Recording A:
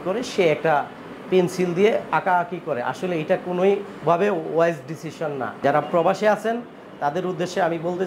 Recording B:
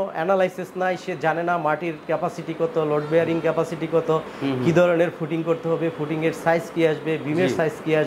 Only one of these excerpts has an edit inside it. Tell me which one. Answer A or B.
A